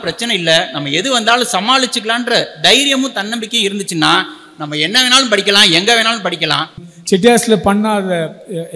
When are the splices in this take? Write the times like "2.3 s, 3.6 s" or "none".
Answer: 6.9 s